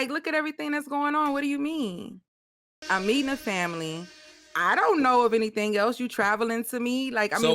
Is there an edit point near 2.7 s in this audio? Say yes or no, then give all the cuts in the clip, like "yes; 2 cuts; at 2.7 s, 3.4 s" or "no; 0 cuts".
yes; 1 cut; at 2.7 s